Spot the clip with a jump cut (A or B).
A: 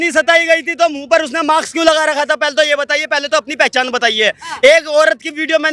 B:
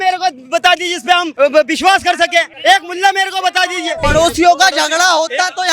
B